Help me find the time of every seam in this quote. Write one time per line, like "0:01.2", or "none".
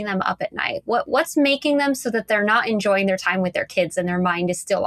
none